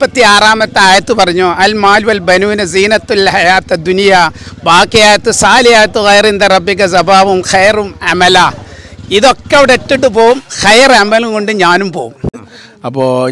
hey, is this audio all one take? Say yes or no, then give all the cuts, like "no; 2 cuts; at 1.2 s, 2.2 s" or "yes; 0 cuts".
no; 1 cut; at 12.3 s